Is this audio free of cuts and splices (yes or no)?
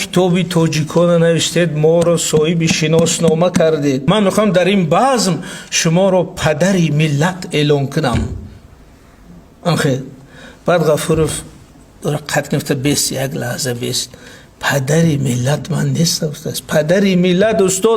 no